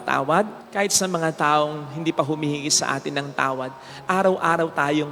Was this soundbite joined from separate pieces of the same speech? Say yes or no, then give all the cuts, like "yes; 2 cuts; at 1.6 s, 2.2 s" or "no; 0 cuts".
no; 0 cuts